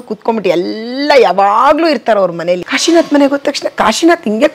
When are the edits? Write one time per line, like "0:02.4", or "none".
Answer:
0:02.7